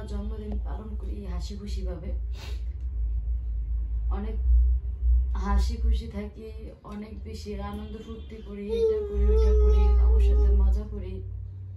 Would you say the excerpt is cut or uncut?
uncut